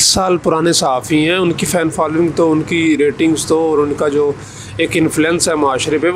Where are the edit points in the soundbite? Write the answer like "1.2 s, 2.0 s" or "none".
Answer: none